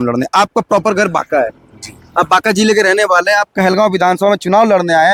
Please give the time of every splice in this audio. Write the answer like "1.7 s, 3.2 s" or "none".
none